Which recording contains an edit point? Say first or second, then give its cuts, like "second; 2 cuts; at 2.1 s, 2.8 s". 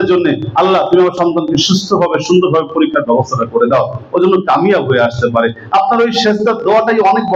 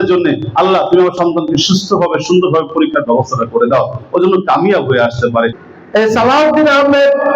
second; 1 cut; at 5.6 s